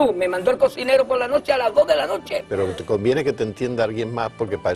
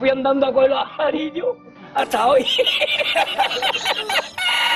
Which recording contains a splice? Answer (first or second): first